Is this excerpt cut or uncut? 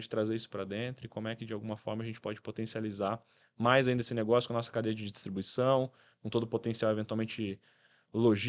uncut